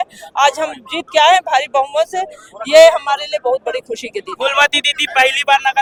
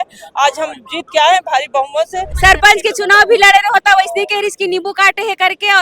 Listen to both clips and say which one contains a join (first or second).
second